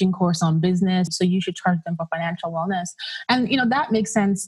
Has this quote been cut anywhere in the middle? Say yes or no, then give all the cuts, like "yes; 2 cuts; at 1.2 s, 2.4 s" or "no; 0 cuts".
yes; 1 cut; at 1.1 s